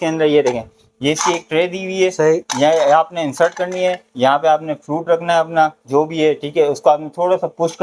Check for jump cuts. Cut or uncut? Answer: uncut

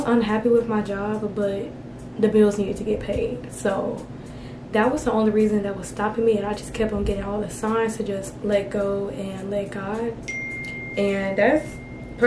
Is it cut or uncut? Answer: uncut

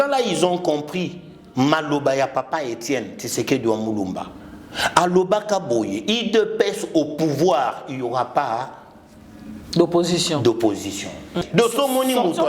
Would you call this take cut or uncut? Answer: cut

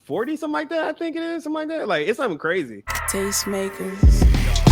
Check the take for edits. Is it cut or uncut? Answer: cut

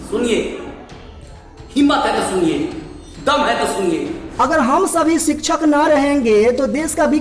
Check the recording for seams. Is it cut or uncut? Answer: cut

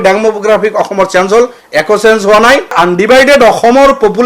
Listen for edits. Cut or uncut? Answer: cut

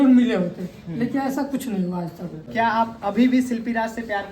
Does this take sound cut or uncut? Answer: cut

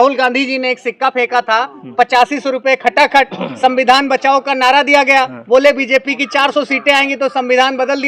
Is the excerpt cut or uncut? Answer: uncut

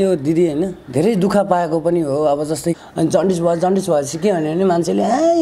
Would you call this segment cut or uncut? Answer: cut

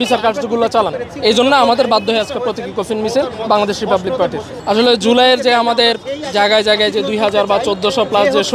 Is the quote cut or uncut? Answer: uncut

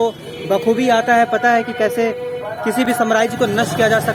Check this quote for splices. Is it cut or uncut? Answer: uncut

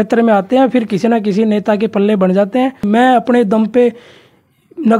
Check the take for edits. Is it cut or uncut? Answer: cut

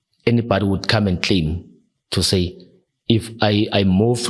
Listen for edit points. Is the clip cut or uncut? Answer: uncut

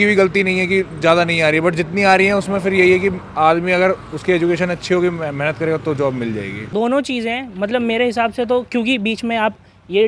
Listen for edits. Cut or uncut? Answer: uncut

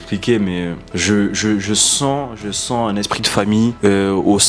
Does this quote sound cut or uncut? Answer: uncut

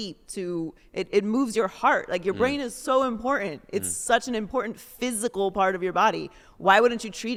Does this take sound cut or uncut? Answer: uncut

